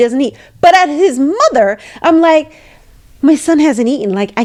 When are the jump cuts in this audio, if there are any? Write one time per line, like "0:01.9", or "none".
none